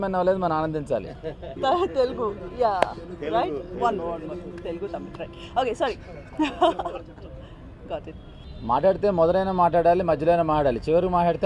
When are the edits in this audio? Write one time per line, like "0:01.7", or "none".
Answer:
0:01.5
0:08.4